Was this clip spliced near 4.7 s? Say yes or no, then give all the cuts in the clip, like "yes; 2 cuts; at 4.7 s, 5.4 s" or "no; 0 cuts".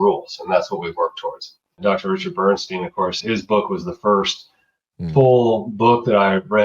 no; 2 cuts; at 1.8 s, 3.2 s